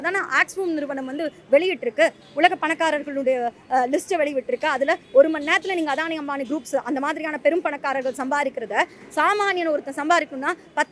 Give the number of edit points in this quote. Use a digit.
0